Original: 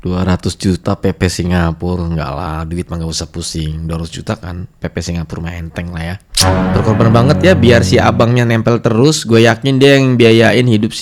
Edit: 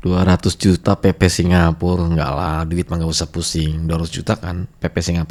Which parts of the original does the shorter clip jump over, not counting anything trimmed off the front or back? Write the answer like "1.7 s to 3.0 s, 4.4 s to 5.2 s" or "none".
none